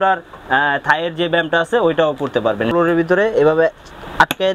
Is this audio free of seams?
no; 1 cut; at 2.7 s

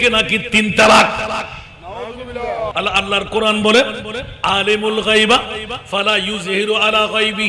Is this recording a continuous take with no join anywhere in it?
no; 1 cut; at 2.7 s

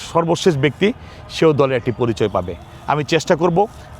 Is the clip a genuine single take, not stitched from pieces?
yes; 0 cuts

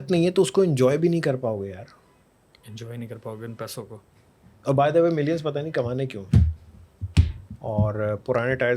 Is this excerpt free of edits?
no; 1 cut; at 7.4 s

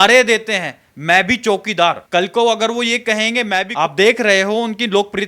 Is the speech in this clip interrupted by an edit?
yes; 2 cuts; at 2.0 s, 3.7 s

